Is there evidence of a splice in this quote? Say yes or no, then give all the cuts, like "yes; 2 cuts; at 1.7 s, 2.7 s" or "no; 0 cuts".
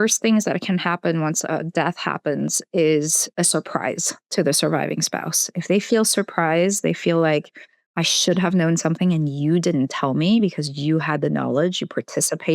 yes; 1 cut; at 3.3 s